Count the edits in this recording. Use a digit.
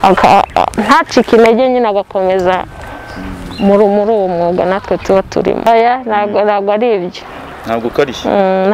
1